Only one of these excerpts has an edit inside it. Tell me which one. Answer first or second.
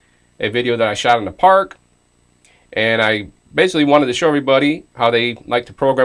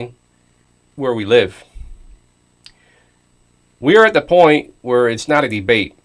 first